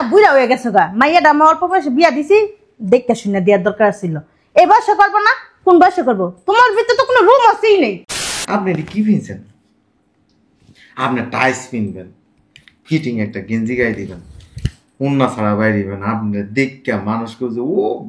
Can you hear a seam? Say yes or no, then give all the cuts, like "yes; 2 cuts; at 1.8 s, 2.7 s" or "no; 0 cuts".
yes; 1 cut; at 8.3 s